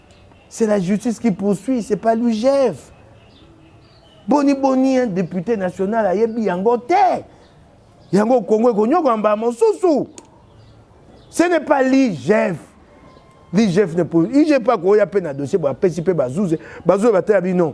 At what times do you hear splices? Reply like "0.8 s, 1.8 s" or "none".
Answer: none